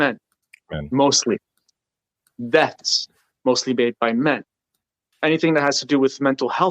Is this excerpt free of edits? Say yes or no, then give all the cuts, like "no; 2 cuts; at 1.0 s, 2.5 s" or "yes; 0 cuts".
no; 1 cut; at 5.1 s